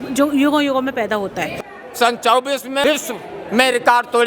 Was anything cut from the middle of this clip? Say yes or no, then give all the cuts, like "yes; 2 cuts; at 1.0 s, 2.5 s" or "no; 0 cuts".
yes; 2 cuts; at 1.5 s, 2.8 s